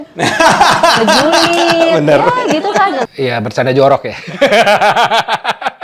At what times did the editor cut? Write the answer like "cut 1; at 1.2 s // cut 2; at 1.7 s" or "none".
cut 1; at 3.1 s